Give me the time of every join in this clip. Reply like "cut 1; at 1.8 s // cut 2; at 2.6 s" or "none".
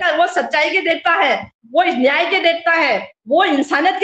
none